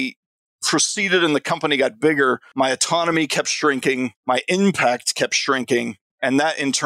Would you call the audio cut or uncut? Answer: cut